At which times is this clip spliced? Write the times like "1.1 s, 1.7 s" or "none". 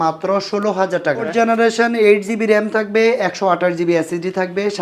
1.3 s